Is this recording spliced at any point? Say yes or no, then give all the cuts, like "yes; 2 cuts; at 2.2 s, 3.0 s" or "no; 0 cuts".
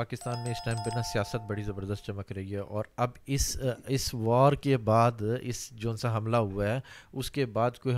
no; 0 cuts